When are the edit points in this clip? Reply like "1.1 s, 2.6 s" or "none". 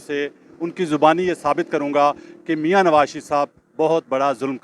none